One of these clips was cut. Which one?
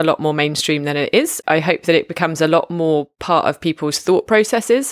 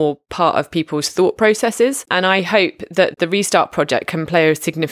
first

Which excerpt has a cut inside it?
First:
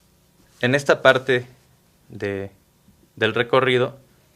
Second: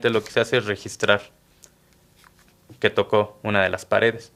first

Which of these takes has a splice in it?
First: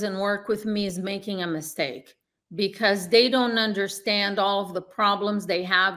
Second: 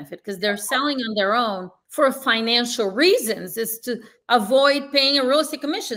second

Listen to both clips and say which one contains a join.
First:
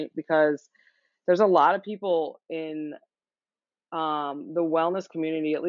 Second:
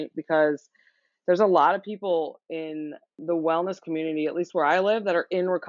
second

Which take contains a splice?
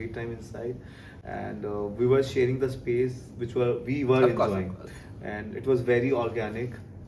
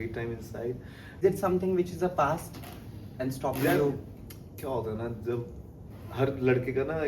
second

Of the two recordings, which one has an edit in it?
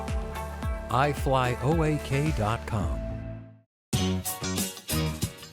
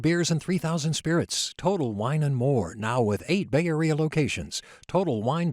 first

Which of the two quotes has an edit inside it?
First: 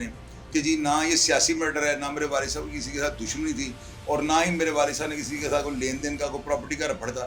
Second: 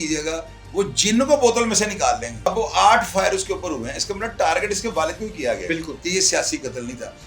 second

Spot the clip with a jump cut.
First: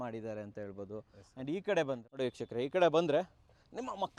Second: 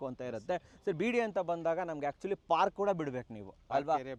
first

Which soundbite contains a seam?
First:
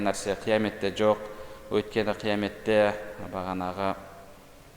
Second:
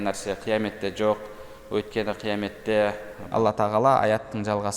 second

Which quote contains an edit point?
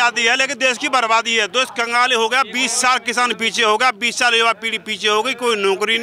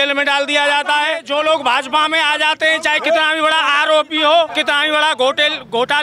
second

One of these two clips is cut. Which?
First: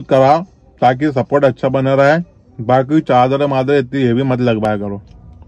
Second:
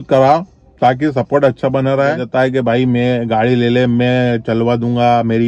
second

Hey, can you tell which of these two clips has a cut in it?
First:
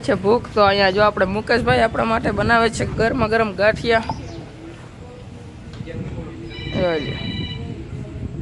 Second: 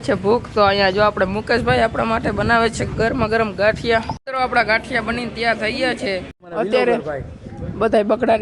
second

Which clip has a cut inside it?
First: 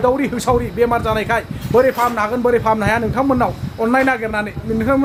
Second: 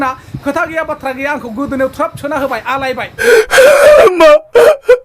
second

